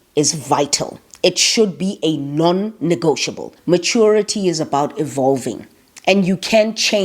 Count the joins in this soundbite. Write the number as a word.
one